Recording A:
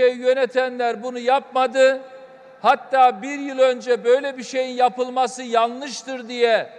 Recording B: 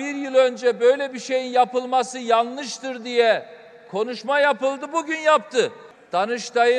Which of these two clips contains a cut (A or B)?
B